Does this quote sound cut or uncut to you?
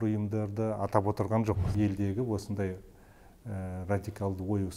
cut